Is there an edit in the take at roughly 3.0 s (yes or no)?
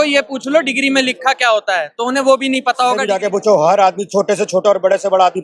yes